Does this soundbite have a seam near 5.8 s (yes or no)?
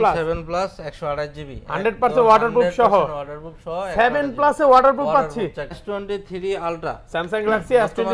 yes